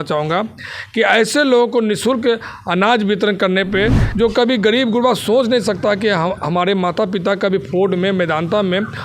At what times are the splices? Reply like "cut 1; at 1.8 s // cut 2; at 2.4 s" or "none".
cut 1; at 4.0 s